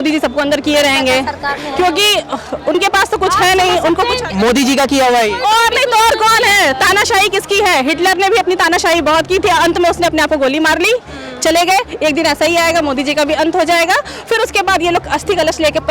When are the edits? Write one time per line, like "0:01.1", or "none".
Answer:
none